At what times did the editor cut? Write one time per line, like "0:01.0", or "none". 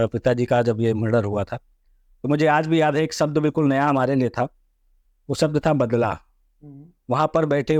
none